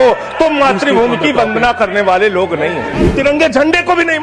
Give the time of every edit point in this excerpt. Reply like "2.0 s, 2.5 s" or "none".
3.1 s